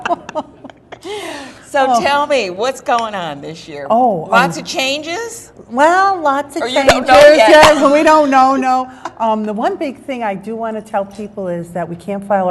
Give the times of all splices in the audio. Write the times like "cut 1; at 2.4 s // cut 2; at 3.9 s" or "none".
none